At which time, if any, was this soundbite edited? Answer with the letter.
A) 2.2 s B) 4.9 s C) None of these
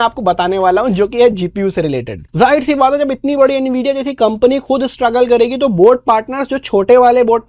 A